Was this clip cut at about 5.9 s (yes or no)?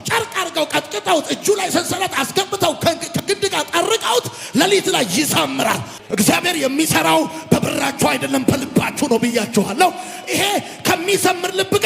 yes